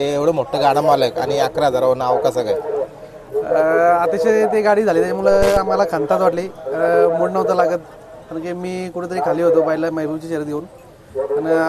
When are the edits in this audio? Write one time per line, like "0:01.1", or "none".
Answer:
none